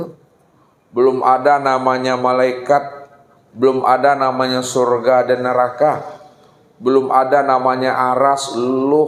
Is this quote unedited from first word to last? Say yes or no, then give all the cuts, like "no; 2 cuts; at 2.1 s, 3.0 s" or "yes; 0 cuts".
yes; 0 cuts